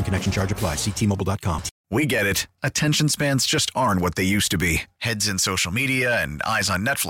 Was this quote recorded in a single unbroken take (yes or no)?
no